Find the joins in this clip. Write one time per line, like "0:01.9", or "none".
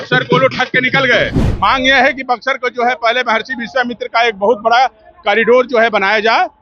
0:01.4